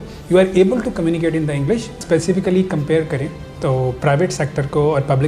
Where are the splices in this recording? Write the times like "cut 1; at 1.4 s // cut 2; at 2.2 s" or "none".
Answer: cut 1; at 2.0 s